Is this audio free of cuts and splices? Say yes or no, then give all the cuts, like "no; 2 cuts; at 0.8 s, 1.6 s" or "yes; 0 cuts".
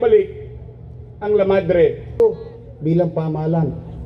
no; 1 cut; at 2.2 s